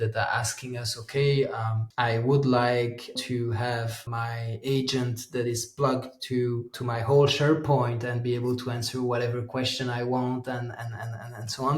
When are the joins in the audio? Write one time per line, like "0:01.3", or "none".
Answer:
0:01.8
0:03.2
0:04.0
0:06.7